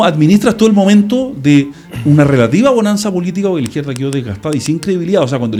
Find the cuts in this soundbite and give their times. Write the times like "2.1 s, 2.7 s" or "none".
none